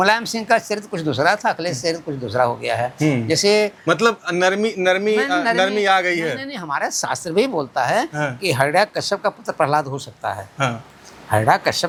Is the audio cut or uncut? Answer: uncut